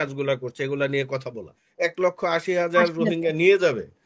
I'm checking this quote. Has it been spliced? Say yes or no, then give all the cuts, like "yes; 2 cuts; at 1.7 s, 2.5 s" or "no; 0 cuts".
yes; 1 cut; at 1.6 s